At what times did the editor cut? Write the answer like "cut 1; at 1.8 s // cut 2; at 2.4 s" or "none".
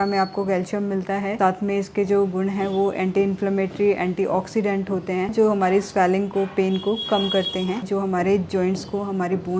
cut 1; at 5.3 s // cut 2; at 7.8 s